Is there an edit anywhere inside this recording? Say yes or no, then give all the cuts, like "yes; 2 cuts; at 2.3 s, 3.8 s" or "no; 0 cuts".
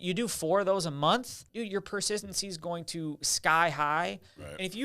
yes; 1 cut; at 1.4 s